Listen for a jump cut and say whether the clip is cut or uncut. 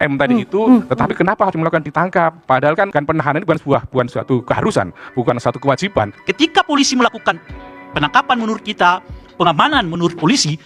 cut